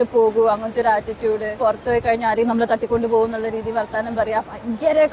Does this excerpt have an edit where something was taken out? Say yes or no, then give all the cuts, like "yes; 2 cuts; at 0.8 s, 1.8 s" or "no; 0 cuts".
yes; 1 cut; at 1.6 s